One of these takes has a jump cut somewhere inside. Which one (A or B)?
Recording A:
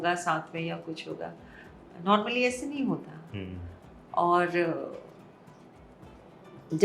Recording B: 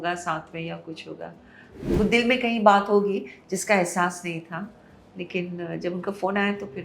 B